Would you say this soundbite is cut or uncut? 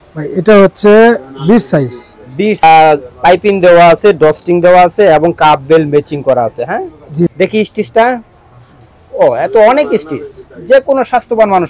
cut